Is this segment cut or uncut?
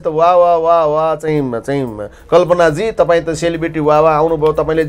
uncut